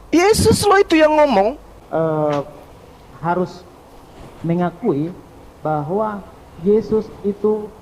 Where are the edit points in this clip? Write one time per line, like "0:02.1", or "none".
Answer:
0:01.7